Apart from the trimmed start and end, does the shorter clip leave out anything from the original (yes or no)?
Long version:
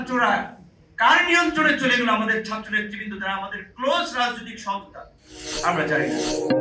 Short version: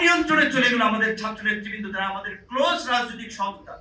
no